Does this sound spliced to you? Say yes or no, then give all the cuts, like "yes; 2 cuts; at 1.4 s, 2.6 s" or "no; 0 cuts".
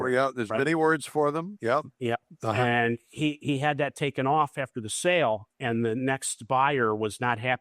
yes; 1 cut; at 5.5 s